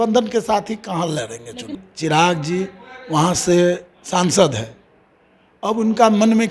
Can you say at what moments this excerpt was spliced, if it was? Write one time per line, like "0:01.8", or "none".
0:01.8